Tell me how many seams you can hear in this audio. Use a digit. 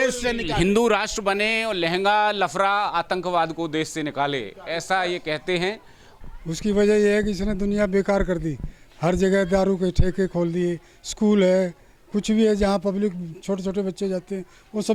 1